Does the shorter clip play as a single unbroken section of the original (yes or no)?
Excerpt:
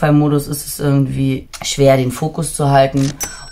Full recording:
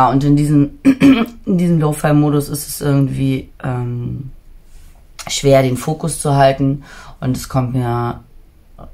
no